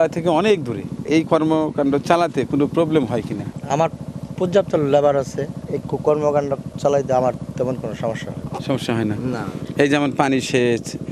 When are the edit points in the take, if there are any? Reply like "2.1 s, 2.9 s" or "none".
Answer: none